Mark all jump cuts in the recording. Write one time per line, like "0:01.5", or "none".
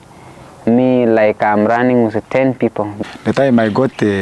0:03.0

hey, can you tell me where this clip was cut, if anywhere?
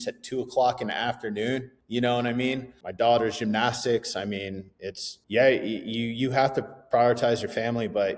0:01.8
0:02.8
0:05.1

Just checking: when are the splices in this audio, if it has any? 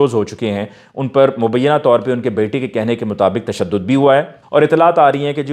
0:04.3

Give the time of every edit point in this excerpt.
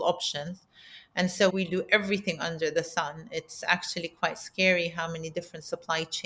0:01.5

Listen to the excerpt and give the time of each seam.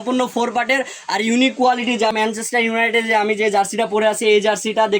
0:02.1

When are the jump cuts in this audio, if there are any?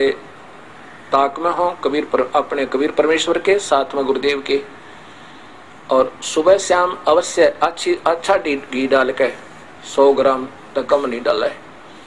none

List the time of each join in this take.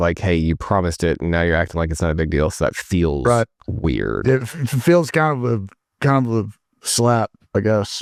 none

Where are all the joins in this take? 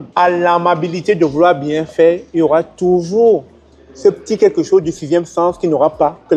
none

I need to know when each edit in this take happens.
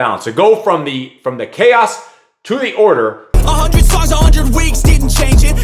0:03.3

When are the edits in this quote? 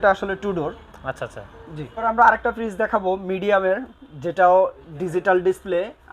0:01.9

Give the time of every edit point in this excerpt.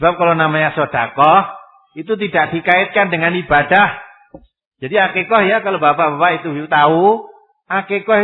none

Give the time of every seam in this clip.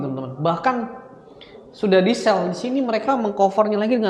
none

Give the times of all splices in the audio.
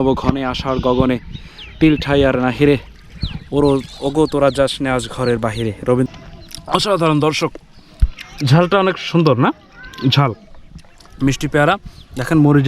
0:06.1

